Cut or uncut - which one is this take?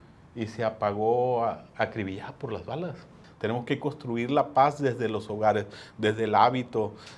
cut